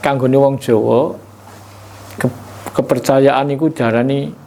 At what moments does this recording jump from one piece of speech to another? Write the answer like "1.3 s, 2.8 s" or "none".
none